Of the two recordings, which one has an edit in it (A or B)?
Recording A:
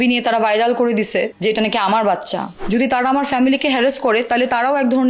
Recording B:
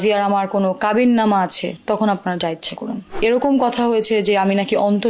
A